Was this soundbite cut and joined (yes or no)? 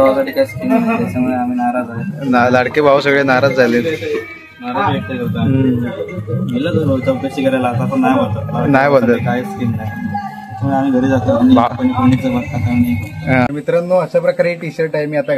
yes